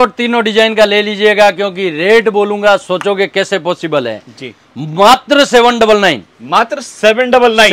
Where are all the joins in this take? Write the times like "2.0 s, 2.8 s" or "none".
none